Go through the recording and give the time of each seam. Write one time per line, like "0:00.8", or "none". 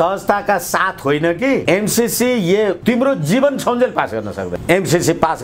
0:01.6
0:02.8
0:04.6